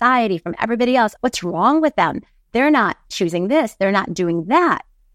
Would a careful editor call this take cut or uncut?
cut